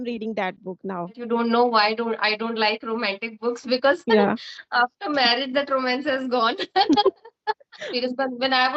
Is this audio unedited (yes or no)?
no